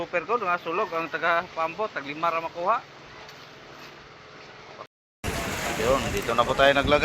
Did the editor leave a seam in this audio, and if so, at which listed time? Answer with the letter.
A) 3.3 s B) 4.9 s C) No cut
B